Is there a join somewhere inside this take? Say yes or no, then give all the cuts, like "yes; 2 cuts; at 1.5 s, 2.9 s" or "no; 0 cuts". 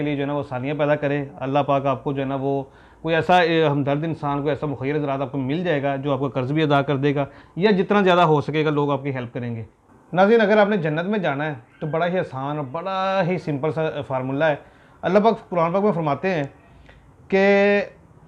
no; 0 cuts